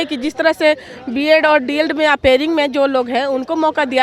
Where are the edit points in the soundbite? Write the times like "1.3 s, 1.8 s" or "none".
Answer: none